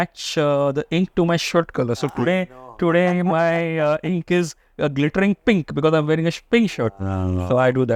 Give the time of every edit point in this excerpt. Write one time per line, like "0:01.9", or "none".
none